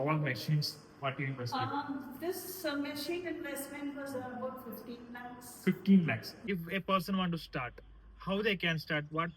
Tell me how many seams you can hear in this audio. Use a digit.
1